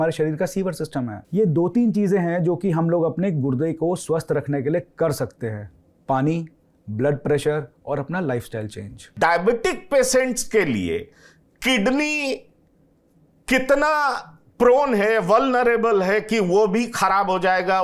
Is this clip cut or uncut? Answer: cut